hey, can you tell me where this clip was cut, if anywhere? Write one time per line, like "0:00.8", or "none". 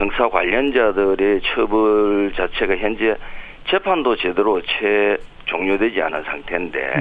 0:02.2